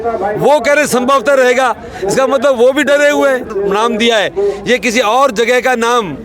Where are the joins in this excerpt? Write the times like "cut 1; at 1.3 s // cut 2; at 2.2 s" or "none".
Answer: cut 1; at 3.5 s